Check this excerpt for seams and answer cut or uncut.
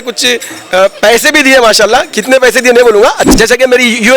cut